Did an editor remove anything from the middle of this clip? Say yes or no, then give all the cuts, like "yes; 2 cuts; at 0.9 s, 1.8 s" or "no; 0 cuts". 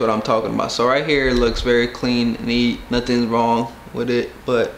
no; 0 cuts